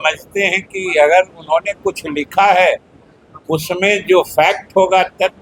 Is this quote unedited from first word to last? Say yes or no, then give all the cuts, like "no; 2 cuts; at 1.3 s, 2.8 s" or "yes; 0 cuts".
yes; 0 cuts